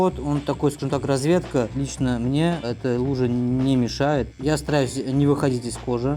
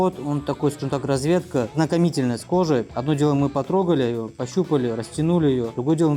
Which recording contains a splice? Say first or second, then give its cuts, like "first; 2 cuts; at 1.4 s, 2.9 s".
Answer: first; 2 cuts; at 1.7 s, 4.3 s